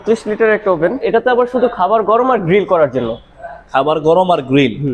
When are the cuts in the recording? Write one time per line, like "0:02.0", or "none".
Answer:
0:01.0